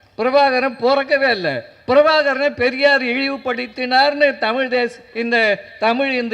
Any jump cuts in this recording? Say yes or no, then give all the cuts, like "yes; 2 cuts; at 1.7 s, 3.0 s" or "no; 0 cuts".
no; 0 cuts